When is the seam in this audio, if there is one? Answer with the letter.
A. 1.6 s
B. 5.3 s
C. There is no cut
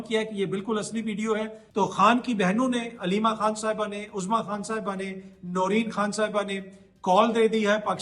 A